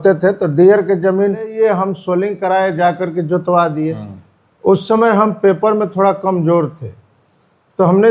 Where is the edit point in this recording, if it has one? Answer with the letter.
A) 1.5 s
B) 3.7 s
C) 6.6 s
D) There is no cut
A